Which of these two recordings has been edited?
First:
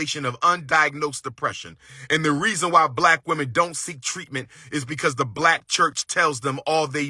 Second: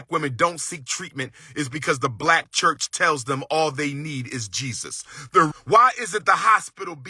second; 1 cut; at 5.5 s

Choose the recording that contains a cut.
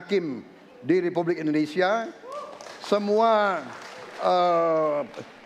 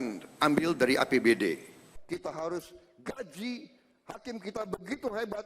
second; 1 cut; at 1.9 s

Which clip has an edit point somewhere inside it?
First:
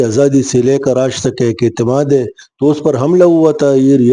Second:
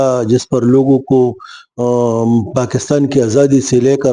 first; 1 cut; at 2.4 s

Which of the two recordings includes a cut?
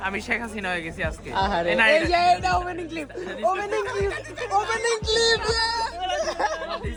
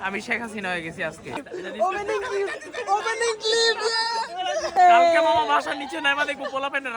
second; 2 cuts; at 1.2 s, 4.7 s

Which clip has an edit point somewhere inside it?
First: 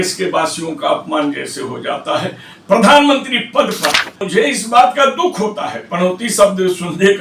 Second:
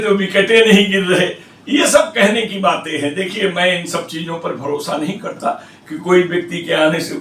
first; 1 cut; at 4.2 s

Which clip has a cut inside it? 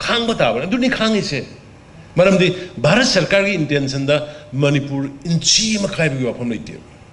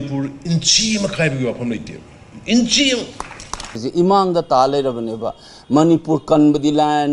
second; 1 cut; at 3.8 s

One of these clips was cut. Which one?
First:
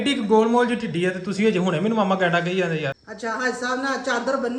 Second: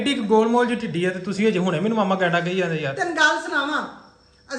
first; 1 cut; at 2.9 s

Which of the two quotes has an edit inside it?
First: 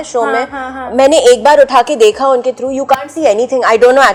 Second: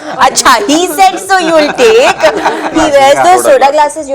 second; 1 cut; at 2.7 s

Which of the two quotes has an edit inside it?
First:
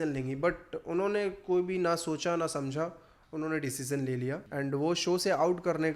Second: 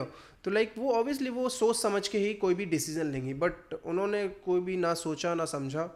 first; 1 cut; at 4.4 s

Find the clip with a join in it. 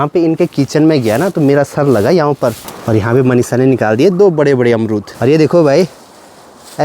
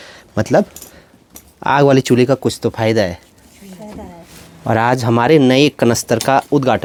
first; 2 cuts; at 2.7 s, 5.1 s

